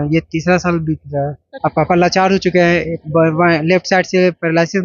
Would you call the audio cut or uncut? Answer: cut